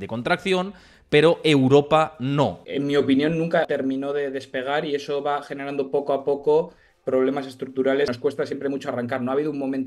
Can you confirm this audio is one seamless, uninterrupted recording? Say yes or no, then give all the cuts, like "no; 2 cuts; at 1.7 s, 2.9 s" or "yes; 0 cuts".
no; 3 cuts; at 2.6 s, 3.7 s, 8.1 s